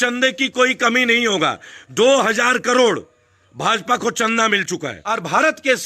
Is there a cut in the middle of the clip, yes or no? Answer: yes